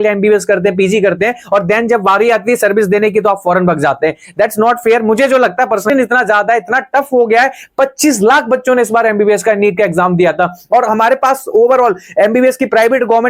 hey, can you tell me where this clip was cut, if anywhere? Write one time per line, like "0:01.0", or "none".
0:05.9